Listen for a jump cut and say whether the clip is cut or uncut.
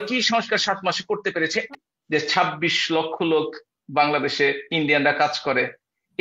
cut